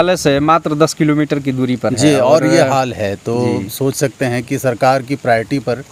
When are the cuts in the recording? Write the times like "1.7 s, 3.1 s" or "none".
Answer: none